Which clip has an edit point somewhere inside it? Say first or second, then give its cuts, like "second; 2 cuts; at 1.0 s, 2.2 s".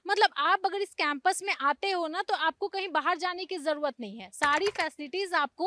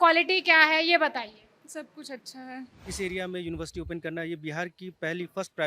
second; 1 cut; at 2.8 s